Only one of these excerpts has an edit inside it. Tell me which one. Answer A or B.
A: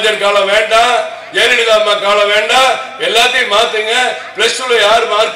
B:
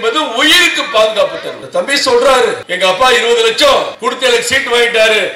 B